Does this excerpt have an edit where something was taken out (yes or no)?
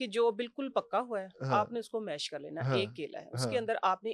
no